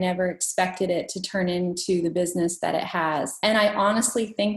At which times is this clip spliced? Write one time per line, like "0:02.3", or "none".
0:03.4